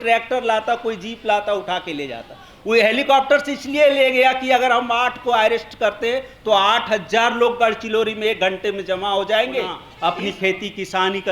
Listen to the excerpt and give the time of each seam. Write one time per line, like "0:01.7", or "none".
0:09.8